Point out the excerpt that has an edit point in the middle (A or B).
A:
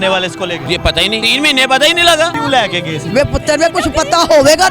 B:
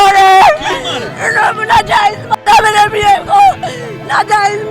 A